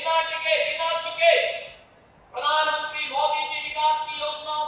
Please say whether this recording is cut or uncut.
uncut